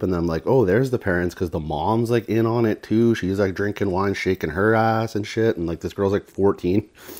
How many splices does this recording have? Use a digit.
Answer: 0